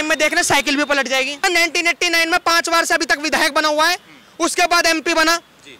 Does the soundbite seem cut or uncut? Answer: cut